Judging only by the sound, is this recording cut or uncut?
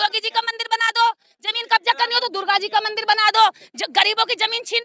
uncut